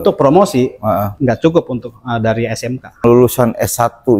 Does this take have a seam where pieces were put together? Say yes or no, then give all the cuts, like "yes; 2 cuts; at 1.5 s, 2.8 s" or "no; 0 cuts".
yes; 1 cut; at 3.0 s